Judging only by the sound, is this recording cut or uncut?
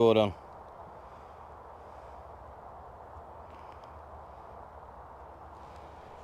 uncut